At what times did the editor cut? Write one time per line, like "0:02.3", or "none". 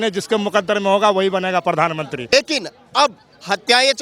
0:02.3